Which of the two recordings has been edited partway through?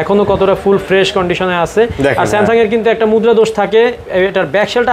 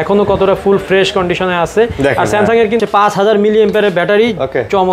second; 1 cut; at 2.8 s

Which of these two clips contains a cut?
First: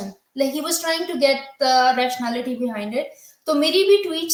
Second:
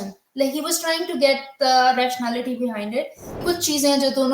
second; 1 cut; at 3.4 s

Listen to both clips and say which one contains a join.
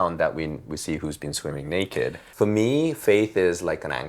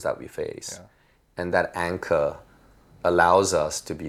first; 1 cut; at 2.2 s

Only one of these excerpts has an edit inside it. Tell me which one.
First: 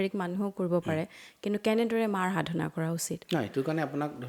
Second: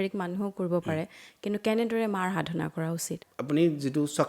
second; 1 cut; at 3.1 s

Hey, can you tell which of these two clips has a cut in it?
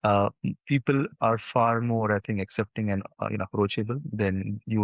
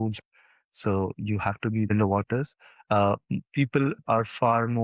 second; 1 cut; at 1.9 s

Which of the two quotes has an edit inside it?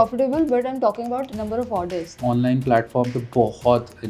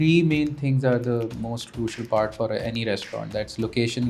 first; 2 cuts; at 1.3 s, 2.2 s

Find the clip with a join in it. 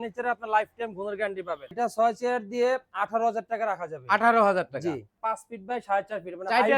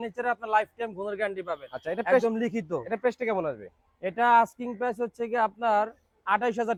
first; 2 cuts; at 1.7 s, 5.2 s

